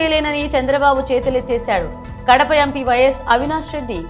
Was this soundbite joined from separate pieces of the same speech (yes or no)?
no